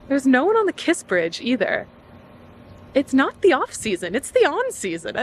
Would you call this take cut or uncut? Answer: uncut